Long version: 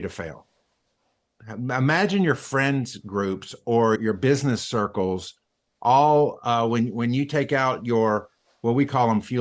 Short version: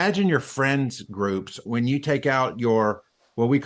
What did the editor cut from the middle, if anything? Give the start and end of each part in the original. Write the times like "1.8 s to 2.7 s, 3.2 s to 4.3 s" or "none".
3.6 s to 6.9 s